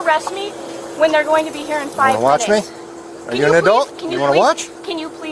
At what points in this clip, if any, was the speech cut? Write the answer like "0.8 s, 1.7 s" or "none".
none